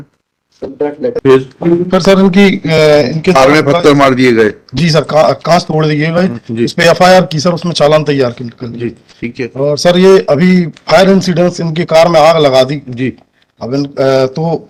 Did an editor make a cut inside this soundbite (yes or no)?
no